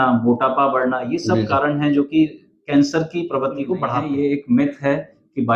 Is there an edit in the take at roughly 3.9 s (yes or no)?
yes